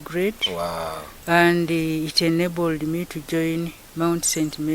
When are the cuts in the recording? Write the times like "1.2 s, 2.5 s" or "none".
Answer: none